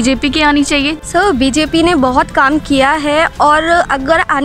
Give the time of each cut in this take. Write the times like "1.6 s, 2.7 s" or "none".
0.9 s

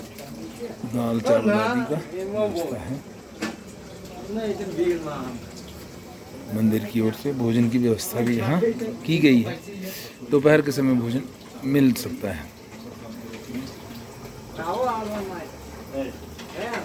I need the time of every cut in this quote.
13.8 s

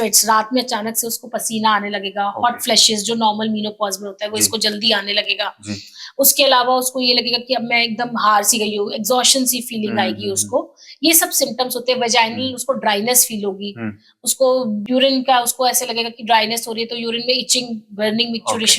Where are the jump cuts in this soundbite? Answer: 14.8 s

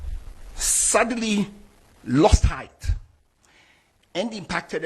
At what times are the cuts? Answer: none

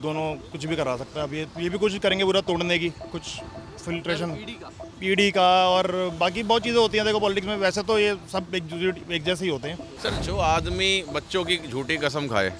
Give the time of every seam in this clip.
9.8 s

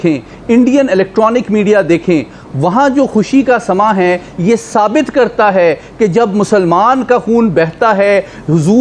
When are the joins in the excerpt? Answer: none

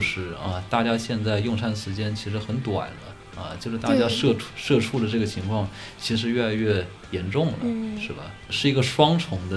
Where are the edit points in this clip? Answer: 8.5 s

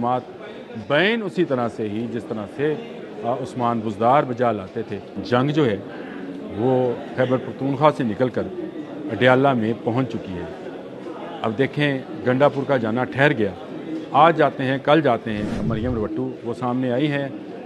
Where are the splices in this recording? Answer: 5.1 s, 15.6 s

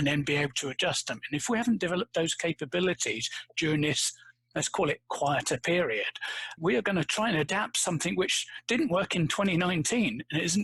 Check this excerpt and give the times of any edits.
none

